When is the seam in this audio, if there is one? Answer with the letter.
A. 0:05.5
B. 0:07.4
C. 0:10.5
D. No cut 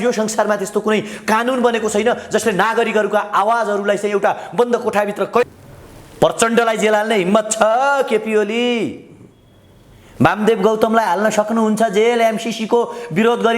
A